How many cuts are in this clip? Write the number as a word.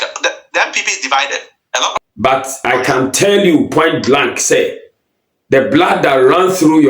one